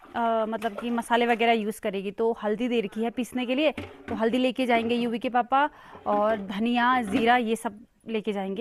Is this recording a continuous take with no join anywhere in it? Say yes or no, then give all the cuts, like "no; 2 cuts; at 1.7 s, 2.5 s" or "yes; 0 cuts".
yes; 0 cuts